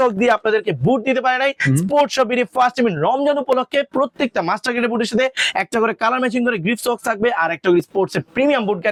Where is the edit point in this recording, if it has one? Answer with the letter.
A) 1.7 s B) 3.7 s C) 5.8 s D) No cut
D